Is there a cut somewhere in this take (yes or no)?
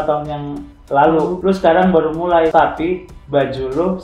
yes